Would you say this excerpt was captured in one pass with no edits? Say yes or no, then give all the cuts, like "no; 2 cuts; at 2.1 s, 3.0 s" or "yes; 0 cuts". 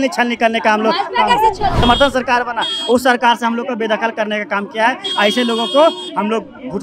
no; 1 cut; at 1.8 s